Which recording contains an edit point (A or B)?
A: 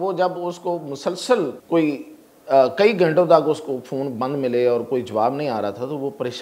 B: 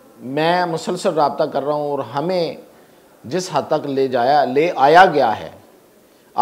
A